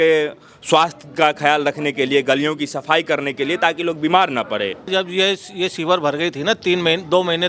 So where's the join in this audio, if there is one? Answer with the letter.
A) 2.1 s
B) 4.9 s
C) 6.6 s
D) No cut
B